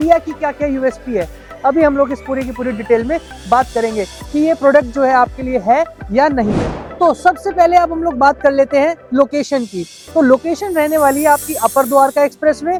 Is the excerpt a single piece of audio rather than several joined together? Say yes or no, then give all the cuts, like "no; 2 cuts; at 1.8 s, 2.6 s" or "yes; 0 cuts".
yes; 0 cuts